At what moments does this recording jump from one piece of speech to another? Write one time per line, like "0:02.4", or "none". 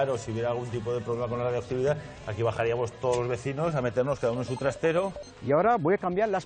0:05.2